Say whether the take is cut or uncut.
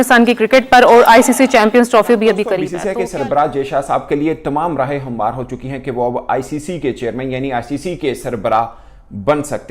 cut